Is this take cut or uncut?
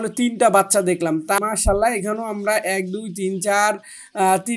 cut